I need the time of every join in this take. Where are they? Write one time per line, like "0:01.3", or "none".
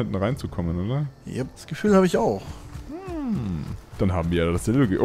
0:01.6
0:03.8